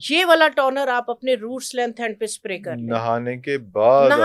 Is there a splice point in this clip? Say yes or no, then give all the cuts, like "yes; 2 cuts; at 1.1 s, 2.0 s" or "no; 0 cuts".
no; 0 cuts